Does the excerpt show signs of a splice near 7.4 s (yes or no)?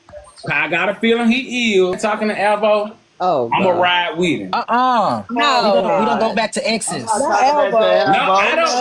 no